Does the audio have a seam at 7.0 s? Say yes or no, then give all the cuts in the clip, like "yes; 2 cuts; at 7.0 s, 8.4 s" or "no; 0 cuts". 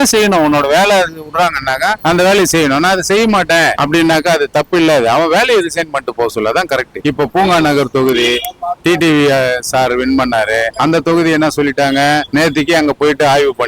yes; 1 cut; at 7.0 s